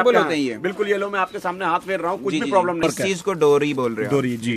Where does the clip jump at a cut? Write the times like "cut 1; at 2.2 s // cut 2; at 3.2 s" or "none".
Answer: cut 1; at 2.8 s